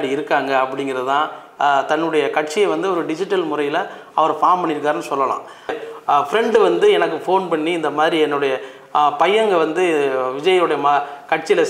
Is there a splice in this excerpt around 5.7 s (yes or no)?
yes